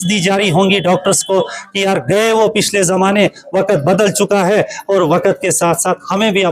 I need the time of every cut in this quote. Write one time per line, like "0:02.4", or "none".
none